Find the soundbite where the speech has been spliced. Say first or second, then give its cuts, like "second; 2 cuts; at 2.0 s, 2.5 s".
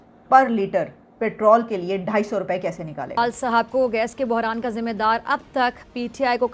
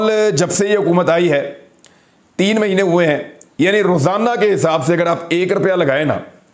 first; 1 cut; at 3.2 s